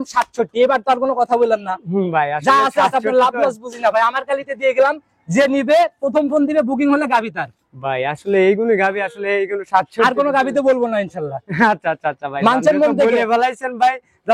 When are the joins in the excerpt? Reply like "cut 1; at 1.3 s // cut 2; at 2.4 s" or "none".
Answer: none